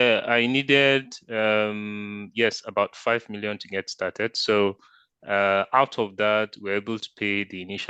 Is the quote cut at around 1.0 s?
no; 0 cuts

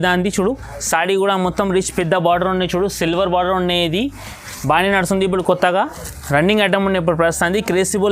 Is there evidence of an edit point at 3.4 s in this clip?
no; 1 cut; at 6.0 s

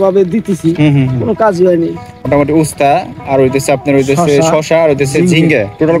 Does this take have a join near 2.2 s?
yes; 1 cut; at 2.2 s

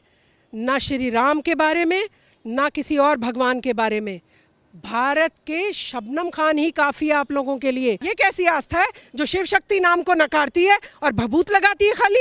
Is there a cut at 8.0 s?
yes; 1 cut; at 8.0 s

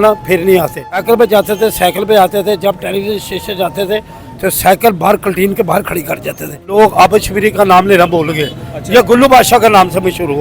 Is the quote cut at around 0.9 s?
yes; 2 cuts; at 0.9 s, 6.7 s

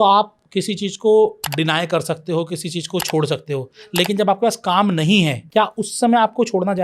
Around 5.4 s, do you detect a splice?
yes; 1 cut; at 5.4 s

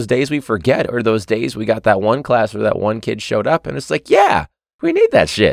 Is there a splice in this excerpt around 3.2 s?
no; 1 cut; at 4.6 s

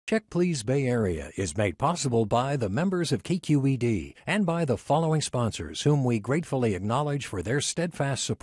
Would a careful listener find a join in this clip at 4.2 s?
no; 0 cuts

